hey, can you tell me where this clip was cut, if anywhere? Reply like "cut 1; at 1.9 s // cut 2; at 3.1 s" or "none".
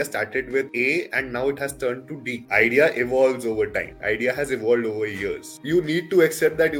cut 1; at 5.6 s